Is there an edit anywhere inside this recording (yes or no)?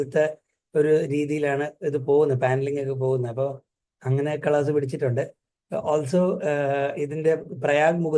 no